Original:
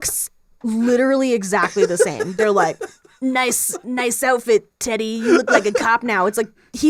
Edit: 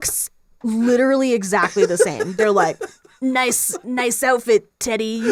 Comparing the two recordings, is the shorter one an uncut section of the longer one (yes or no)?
yes